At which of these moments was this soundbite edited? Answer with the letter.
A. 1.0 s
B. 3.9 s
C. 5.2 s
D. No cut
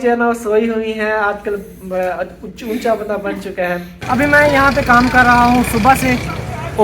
B